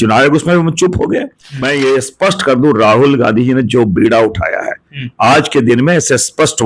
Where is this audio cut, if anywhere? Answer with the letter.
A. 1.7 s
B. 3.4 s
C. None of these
A